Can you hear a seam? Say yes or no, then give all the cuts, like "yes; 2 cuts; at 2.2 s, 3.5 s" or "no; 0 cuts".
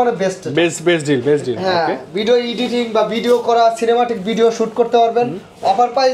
no; 0 cuts